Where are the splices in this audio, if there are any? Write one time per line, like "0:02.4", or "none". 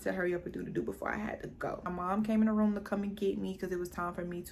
0:01.8